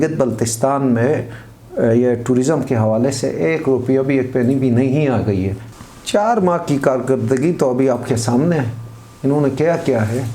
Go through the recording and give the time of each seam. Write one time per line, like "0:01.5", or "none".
0:05.6